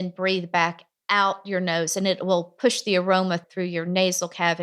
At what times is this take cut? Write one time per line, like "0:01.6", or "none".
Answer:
none